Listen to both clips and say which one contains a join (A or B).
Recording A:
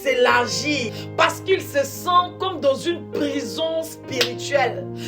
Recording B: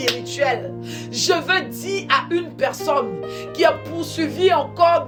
A